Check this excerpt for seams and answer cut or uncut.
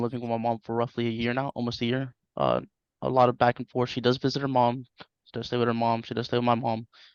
uncut